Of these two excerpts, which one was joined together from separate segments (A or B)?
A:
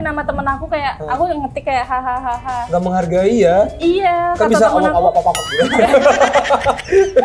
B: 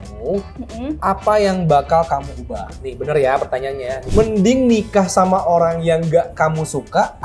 B